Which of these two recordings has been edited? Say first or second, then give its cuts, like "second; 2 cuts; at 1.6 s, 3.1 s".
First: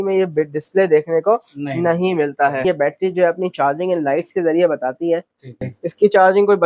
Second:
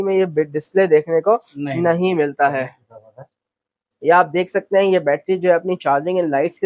first; 2 cuts; at 2.6 s, 5.6 s